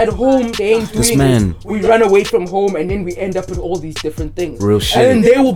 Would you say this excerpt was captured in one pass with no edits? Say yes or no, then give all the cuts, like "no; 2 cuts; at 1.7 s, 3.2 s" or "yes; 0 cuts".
yes; 0 cuts